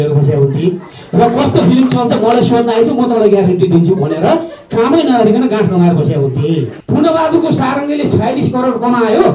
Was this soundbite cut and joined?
yes; 1 cut; at 6.7 s

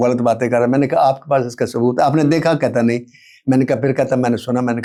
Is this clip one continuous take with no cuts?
yes; 0 cuts

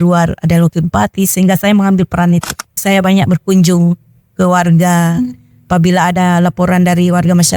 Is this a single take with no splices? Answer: no; 1 cut; at 2.8 s

